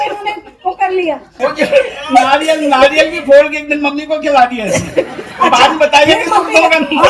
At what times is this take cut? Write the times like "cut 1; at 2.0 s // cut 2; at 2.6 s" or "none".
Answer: cut 1; at 1.3 s